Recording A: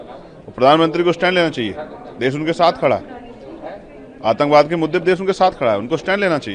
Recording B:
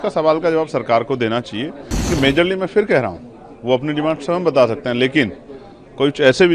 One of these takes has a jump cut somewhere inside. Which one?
B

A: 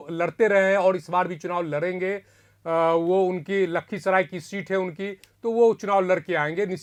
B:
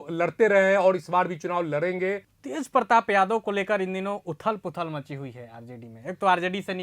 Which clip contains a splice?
B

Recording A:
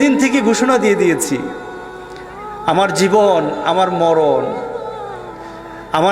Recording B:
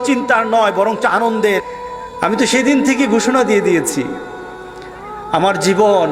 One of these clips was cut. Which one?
B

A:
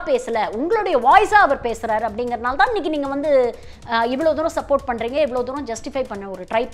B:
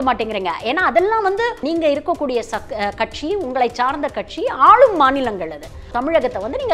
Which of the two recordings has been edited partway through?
B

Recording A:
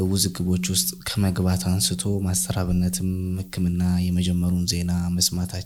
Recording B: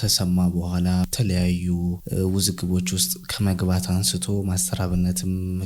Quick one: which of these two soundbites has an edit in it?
B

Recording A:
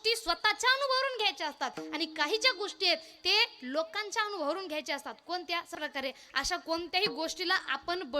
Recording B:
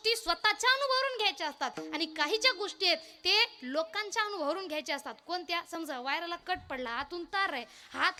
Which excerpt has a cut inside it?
A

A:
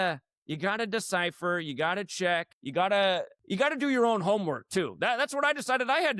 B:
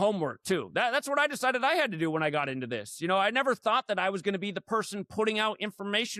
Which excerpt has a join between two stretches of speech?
A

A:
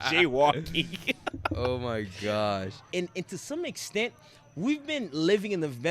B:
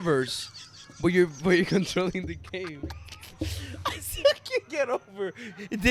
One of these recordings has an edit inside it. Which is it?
A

